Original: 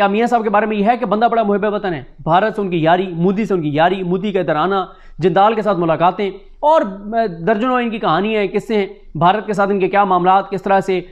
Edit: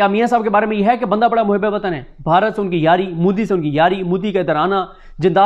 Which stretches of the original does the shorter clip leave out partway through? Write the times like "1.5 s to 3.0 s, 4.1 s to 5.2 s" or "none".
none

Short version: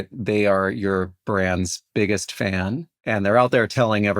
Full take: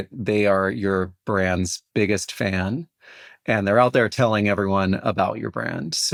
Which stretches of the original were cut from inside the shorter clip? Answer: 2.9 s to 3.3 s

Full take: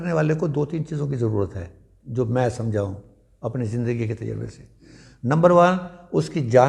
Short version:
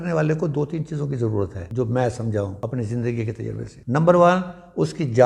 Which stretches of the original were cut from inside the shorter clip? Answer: 1.6 s to 2.0 s, 2.9 s to 3.4 s, 4.5 s to 5.1 s

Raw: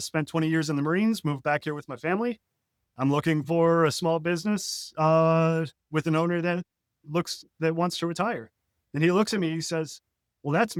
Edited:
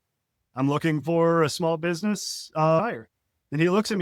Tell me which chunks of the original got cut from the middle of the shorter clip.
5.2 s to 8.2 s

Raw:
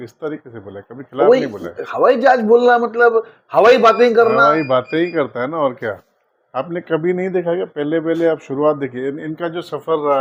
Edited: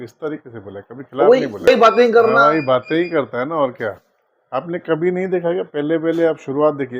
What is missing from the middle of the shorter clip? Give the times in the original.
1.7 s to 3.7 s

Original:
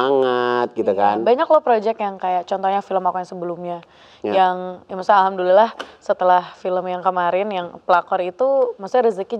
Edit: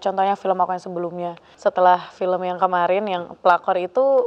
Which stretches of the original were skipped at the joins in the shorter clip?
3.9 s to 5.9 s

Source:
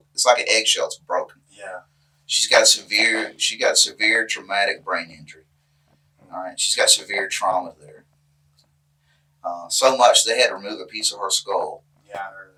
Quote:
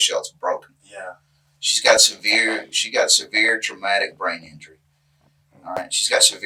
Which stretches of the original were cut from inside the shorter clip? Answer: none

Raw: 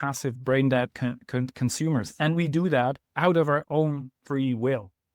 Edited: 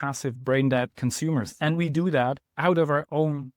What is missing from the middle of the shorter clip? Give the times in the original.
0.9 s to 1.5 s

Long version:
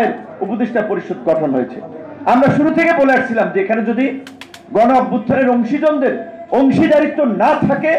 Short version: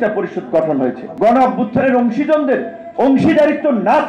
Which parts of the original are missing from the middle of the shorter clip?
1.8 s to 4.6 s

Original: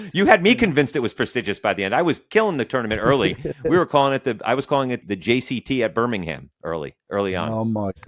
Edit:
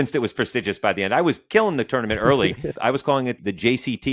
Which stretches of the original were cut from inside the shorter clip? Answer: 3.6 s to 4.4 s

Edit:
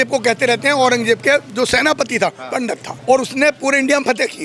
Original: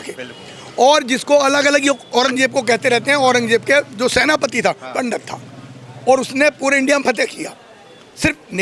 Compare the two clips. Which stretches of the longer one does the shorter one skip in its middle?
5.3 s to 5.9 s

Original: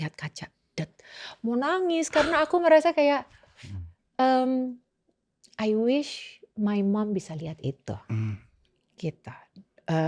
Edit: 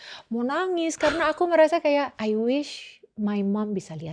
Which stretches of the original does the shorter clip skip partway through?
3.3 s to 5.5 s

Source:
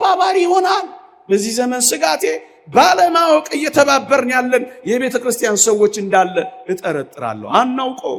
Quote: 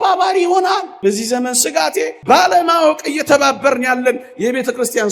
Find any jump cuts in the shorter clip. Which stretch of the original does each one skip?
0.9 s to 1.2 s, 2.4 s to 2.6 s

